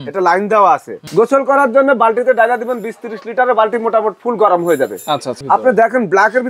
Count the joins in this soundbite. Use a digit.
2